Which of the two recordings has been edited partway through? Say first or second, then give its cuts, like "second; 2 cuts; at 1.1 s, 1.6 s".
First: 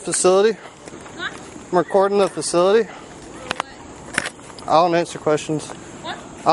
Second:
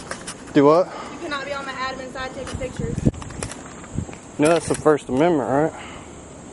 second; 1 cut; at 3.1 s